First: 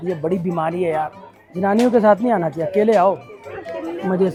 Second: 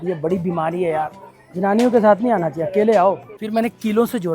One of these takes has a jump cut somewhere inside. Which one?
second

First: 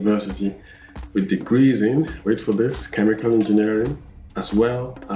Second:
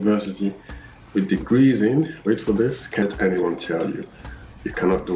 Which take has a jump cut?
second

